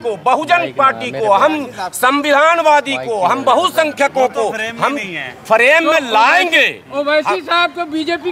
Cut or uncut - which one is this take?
uncut